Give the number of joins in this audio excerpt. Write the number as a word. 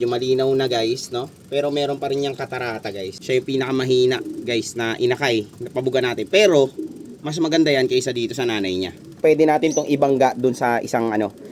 two